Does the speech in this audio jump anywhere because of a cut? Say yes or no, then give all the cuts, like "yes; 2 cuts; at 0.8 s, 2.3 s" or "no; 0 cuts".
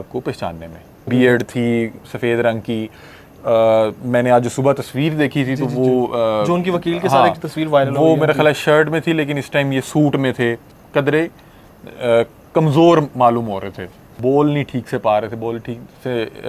yes; 3 cuts; at 1.0 s, 10.7 s, 14.1 s